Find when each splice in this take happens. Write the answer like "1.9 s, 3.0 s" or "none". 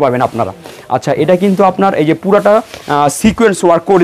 none